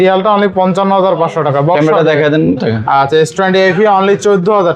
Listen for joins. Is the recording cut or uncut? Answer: cut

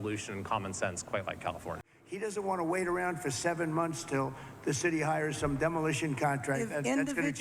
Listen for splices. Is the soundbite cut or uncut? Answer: cut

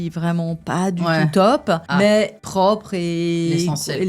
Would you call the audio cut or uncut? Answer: cut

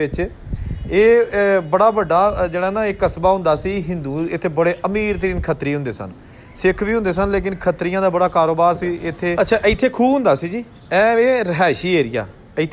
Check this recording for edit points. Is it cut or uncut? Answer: cut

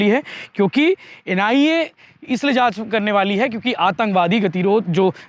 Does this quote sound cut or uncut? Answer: uncut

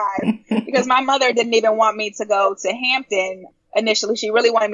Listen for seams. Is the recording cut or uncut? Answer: uncut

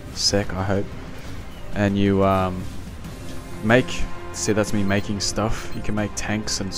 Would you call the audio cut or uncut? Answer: cut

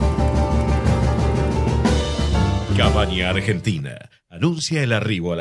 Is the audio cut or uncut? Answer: cut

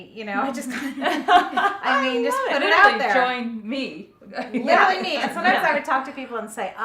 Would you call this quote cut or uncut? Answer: uncut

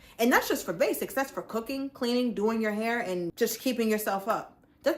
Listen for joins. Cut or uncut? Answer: cut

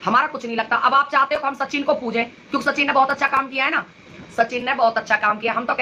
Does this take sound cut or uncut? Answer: uncut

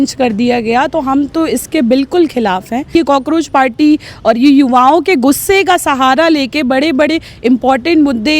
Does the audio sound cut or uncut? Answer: cut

